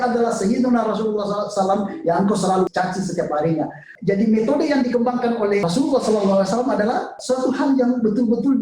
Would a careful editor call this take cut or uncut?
cut